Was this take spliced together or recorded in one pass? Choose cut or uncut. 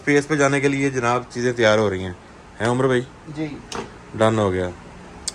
uncut